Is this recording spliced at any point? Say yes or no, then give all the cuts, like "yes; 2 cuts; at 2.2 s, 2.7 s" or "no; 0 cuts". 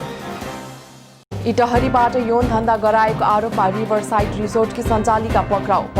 yes; 1 cut; at 1.0 s